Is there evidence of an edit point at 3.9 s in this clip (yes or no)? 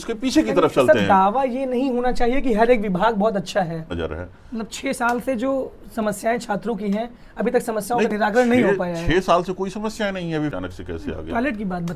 yes